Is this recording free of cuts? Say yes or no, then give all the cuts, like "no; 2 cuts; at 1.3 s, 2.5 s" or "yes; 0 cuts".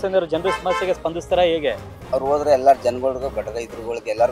yes; 0 cuts